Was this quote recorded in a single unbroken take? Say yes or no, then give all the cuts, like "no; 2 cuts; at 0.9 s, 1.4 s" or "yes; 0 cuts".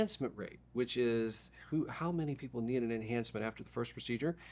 yes; 0 cuts